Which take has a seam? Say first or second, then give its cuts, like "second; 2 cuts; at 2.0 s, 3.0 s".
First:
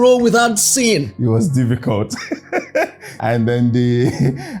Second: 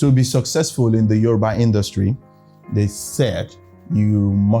first; 1 cut; at 3.0 s